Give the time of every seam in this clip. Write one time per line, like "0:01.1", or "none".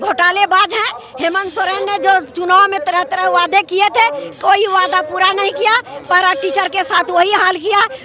none